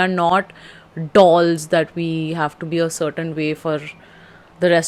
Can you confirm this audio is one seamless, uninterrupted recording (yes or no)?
yes